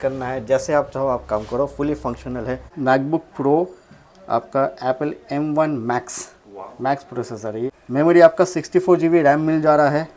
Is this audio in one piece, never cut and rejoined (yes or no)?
no